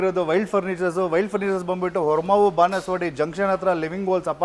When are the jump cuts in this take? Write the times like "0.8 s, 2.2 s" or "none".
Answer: none